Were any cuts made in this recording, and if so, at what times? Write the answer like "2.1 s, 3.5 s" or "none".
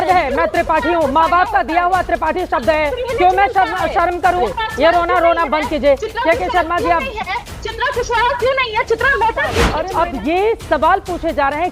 4.5 s, 9.7 s